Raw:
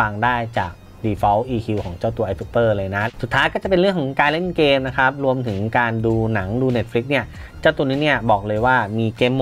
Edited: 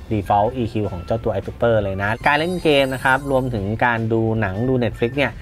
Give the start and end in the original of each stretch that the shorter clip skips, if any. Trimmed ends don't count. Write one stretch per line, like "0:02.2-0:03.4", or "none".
0:03.1-0:04.1